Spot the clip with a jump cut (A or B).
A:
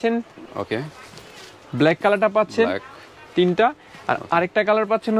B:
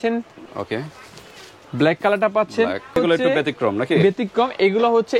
B